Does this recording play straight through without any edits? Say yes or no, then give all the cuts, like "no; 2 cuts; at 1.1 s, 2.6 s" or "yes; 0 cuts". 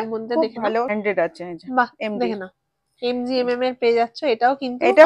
no; 1 cut; at 0.9 s